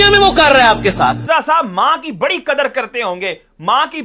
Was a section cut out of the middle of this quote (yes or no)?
yes